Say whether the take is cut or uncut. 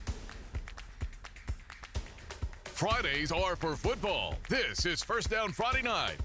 uncut